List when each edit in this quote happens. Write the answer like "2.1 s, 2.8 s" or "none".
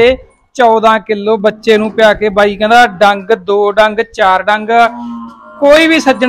none